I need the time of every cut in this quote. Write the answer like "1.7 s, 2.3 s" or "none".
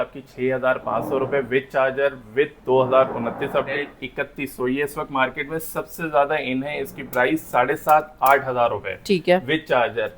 3.8 s